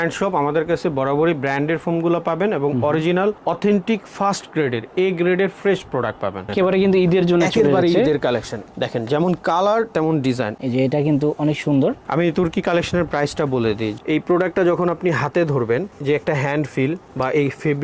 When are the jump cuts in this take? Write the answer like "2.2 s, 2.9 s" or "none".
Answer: 6.5 s, 10.5 s, 13.9 s